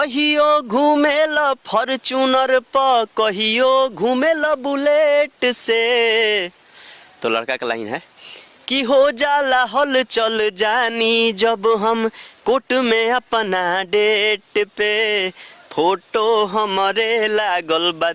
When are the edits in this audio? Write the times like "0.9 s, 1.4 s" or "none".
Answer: none